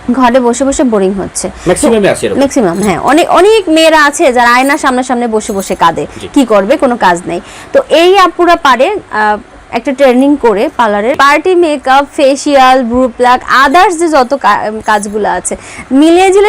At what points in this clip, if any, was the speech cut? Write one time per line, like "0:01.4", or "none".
0:11.1